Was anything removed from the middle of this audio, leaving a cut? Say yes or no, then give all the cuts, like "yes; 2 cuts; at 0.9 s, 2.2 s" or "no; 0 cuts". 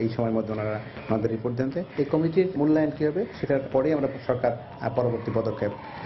no; 0 cuts